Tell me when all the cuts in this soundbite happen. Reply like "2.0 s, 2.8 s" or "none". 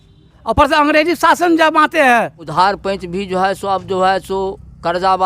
2.5 s